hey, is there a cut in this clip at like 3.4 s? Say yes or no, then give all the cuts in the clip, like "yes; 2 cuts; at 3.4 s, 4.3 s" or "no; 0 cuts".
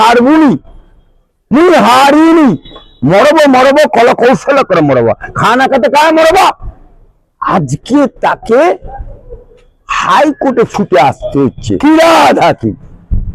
no; 1 cut; at 11.7 s